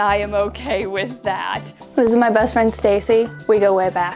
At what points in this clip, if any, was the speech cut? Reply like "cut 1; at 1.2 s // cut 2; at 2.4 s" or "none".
cut 1; at 1.7 s // cut 2; at 3.3 s